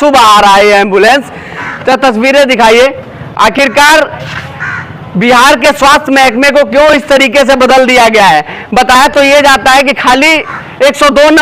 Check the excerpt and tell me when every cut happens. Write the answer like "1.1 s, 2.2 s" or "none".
none

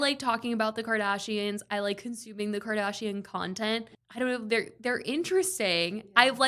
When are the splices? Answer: 3.8 s

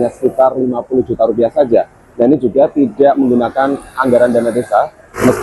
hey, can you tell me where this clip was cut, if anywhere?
none

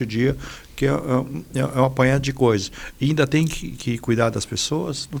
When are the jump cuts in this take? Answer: none

